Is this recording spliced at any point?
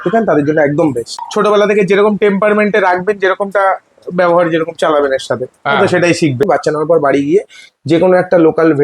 yes; 2 cuts; at 1.1 s, 6.4 s

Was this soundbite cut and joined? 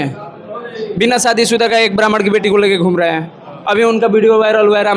no; 0 cuts

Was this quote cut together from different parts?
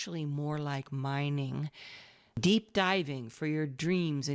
yes; 1 cut; at 2.3 s

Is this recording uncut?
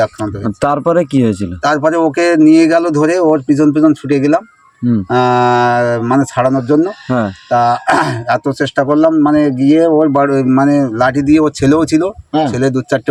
yes; 0 cuts

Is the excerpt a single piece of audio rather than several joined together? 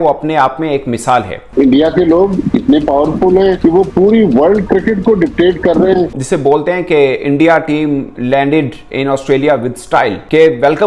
no; 2 cuts; at 1.5 s, 6.1 s

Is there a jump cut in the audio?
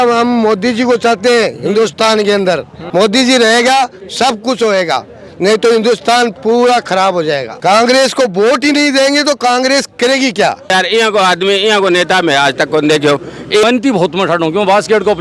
yes; 4 cuts; at 2.7 s, 7.5 s, 10.7 s, 13.6 s

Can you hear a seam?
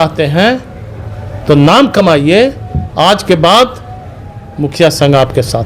no; 0 cuts

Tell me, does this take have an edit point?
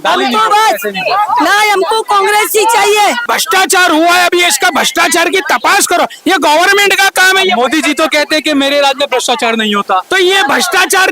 yes; 1 cut; at 3.3 s

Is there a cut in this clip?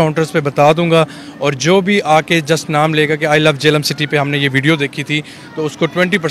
no; 0 cuts

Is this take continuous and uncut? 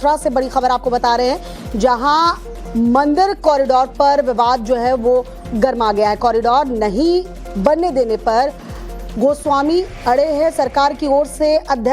no; 1 cut; at 7.4 s

